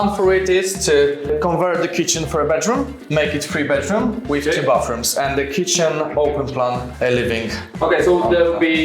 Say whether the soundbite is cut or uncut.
uncut